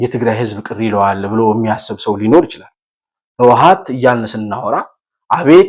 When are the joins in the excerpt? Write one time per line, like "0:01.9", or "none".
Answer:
none